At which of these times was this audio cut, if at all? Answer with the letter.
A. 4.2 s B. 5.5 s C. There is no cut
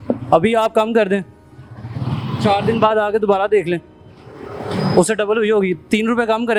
C